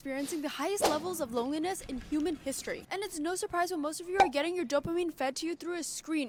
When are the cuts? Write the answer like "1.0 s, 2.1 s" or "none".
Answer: none